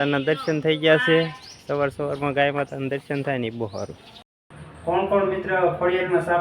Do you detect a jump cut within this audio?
yes; 1 cut; at 4.5 s

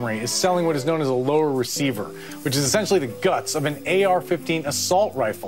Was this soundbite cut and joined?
no; 0 cuts

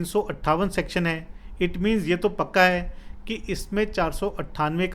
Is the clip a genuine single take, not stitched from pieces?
yes; 0 cuts

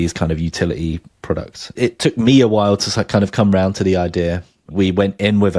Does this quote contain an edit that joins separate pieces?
yes; 2 cuts; at 1.3 s, 4.7 s

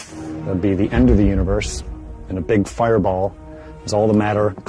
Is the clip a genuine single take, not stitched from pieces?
yes; 0 cuts

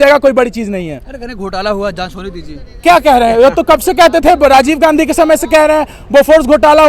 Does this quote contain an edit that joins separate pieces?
no; 0 cuts

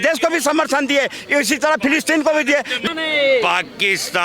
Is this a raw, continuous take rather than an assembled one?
no; 1 cut; at 2.8 s

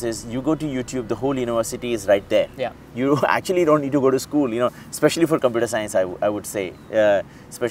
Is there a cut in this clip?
no; 0 cuts

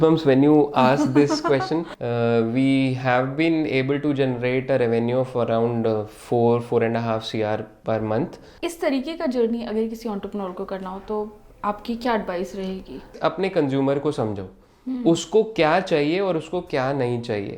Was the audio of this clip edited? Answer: yes; 3 cuts; at 2.0 s, 8.5 s, 13.1 s

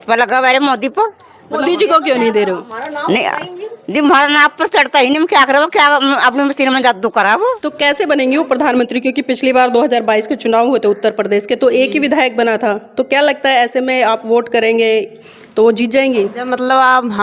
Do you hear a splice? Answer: yes; 2 cuts; at 1.6 s, 7.7 s

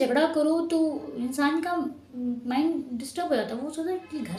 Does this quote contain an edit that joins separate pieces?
no; 0 cuts

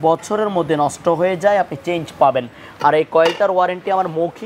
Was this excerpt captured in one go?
yes; 0 cuts

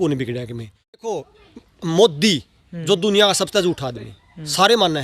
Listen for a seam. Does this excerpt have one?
yes; 1 cut; at 1.1 s

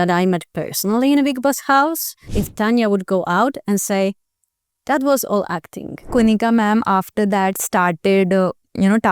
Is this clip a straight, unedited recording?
no; 2 cuts; at 2.4 s, 6.1 s

